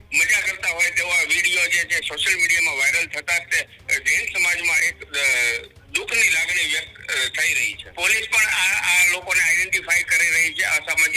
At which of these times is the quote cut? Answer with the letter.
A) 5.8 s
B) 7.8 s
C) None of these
B